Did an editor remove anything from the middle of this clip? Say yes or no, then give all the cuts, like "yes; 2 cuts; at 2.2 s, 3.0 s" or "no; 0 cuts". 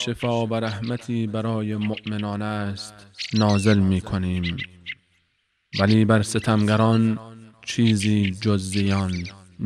no; 0 cuts